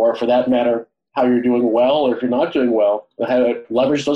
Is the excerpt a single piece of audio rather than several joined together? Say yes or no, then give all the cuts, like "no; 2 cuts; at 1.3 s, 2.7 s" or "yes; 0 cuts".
no; 1 cut; at 1.0 s